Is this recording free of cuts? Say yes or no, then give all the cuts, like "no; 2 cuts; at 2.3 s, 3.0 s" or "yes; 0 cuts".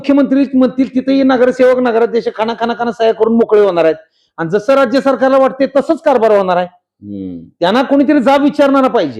yes; 0 cuts